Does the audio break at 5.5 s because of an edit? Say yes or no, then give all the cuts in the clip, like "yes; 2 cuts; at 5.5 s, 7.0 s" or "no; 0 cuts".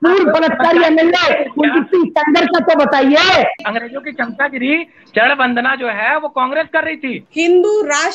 no; 2 cuts; at 3.6 s, 7.2 s